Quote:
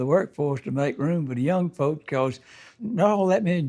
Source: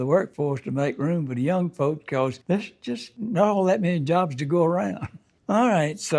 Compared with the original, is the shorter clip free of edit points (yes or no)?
no